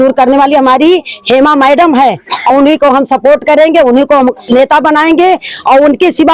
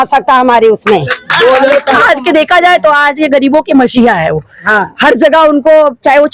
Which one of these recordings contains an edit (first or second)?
second